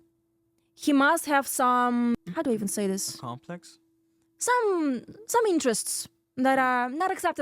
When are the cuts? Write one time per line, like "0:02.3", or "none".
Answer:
0:02.1